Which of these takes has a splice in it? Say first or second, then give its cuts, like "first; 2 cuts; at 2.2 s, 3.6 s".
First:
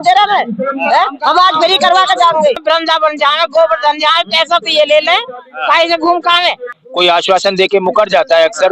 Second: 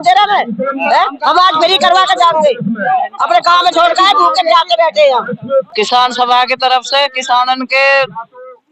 first; 2 cuts; at 2.6 s, 6.8 s